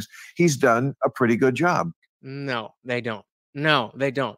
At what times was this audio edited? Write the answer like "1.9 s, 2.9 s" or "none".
none